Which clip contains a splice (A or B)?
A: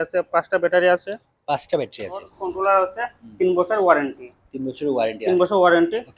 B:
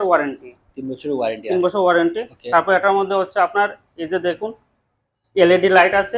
A